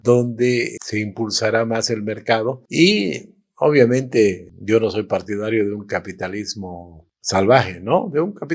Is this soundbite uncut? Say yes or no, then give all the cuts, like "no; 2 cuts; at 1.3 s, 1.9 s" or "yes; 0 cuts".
yes; 0 cuts